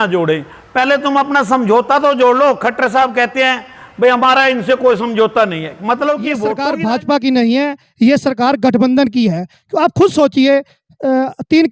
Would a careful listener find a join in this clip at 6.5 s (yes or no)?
yes